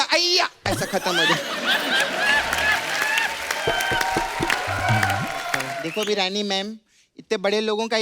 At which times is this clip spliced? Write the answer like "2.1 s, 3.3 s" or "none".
5.8 s

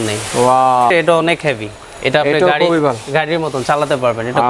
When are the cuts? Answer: 0.9 s

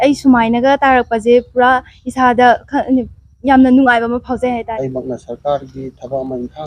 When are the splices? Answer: 4.8 s

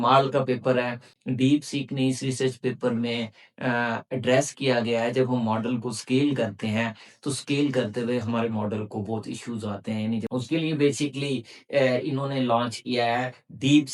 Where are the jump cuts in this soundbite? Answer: 1.1 s, 10.3 s

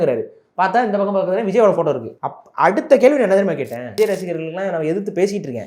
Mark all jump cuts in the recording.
3.9 s

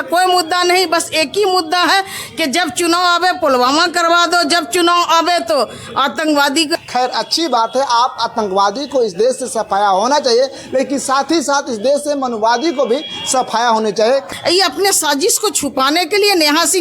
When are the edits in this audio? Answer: 6.7 s, 14.3 s

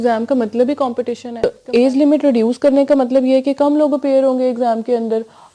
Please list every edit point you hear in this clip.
1.3 s

